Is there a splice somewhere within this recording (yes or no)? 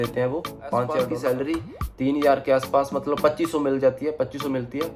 yes